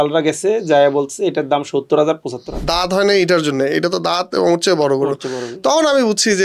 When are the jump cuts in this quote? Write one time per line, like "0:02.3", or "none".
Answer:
0:02.5

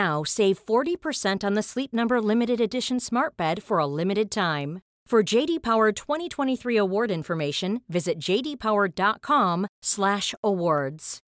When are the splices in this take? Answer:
none

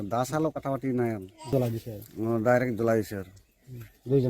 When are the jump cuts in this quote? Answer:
0:01.5

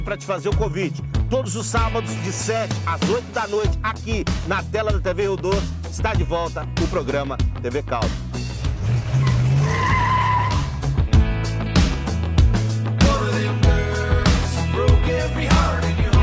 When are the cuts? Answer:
none

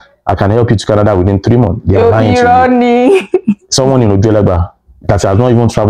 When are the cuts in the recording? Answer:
none

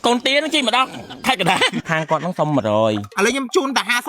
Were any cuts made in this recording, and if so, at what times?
0:01.8
0:03.1

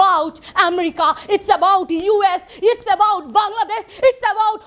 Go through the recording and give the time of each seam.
none

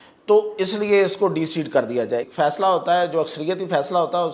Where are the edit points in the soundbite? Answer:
0:02.3

